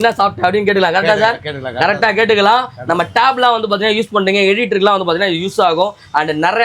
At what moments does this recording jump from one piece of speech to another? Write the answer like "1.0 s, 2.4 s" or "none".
none